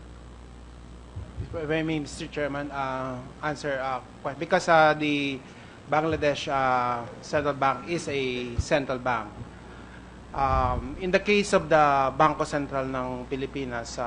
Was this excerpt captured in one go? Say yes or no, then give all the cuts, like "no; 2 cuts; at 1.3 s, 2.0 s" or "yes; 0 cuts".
yes; 0 cuts